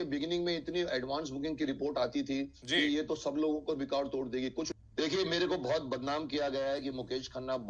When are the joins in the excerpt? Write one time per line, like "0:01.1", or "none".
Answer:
0:04.7